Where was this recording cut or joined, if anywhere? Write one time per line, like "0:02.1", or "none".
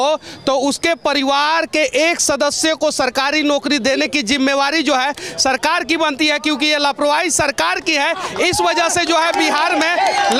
none